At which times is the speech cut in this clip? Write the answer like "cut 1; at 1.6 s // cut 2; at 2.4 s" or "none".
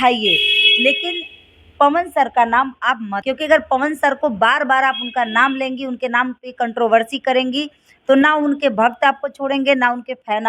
cut 1; at 3.2 s